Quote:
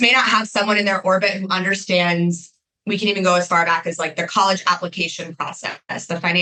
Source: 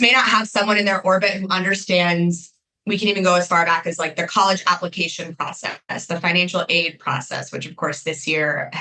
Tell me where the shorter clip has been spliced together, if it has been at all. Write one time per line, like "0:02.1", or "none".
none